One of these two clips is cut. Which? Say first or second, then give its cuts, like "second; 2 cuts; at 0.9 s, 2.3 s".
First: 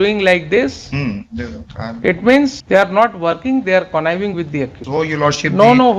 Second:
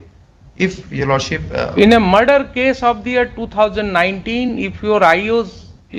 first; 2 cuts; at 2.6 s, 4.8 s